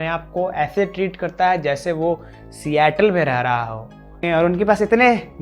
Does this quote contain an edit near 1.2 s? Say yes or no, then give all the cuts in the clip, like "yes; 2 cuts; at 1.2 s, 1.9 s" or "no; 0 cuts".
no; 1 cut; at 4.2 s